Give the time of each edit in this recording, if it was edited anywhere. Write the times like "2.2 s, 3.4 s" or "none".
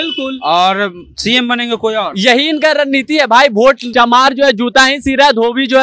3.9 s

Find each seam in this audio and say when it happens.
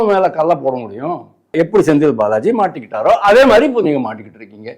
1.5 s

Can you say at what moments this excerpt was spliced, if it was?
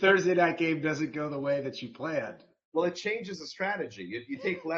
none

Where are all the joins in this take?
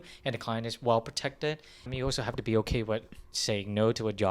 1.9 s

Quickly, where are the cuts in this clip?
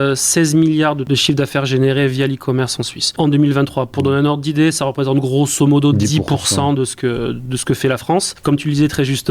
1.0 s, 3.1 s, 8.3 s

